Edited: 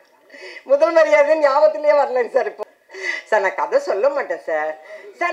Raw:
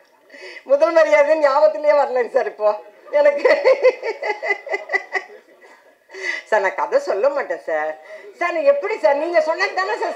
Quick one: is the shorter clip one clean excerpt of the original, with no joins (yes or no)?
no